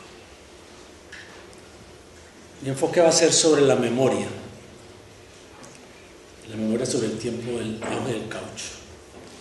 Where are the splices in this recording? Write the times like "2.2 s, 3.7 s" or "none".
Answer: 8.0 s